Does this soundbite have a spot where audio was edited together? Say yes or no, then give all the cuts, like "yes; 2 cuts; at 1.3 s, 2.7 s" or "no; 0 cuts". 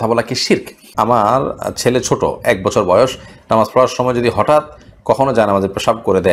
yes; 1 cut; at 1.1 s